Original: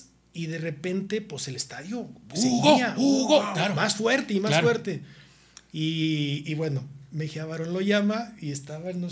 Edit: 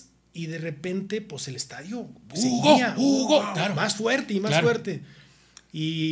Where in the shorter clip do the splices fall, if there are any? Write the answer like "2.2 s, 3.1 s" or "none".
none